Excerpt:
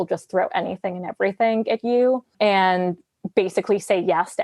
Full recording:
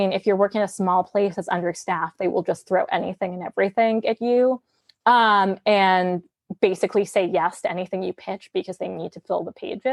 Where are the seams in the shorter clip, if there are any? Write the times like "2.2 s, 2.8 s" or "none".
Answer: 2.3 s